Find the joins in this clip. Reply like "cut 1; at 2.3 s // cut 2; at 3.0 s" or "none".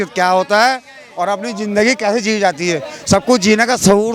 none